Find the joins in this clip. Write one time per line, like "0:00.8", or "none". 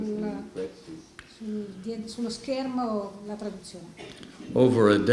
0:03.5